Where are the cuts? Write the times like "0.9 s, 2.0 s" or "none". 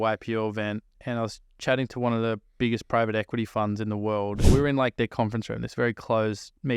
4.5 s